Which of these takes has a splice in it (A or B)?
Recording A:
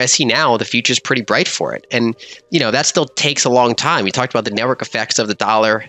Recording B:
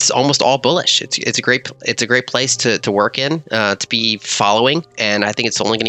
B